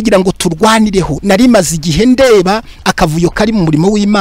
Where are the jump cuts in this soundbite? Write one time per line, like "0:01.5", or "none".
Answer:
0:01.1